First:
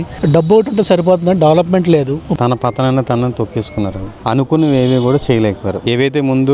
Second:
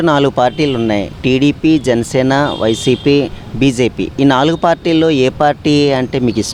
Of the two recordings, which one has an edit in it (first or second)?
first